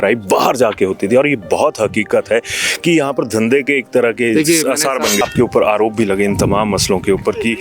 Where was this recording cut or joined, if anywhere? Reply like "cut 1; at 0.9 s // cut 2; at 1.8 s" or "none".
cut 1; at 5.2 s